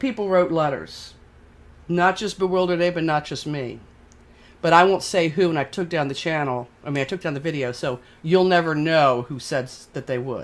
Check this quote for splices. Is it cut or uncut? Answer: uncut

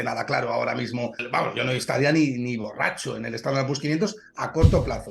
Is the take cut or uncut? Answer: cut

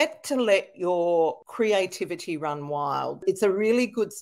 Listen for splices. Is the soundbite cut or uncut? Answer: cut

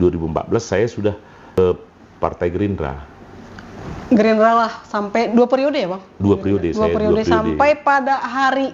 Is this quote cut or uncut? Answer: uncut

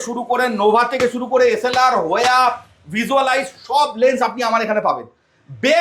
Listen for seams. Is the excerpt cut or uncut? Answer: uncut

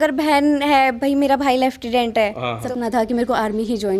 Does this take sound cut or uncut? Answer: cut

